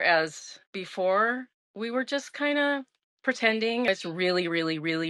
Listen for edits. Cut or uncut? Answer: cut